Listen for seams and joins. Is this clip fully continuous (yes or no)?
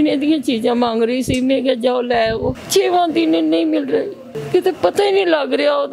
no